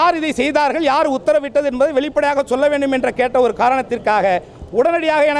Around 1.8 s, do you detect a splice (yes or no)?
no